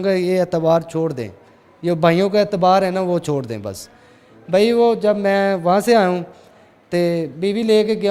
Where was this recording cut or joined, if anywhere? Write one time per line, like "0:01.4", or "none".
none